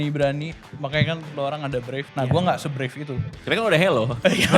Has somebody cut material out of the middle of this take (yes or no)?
yes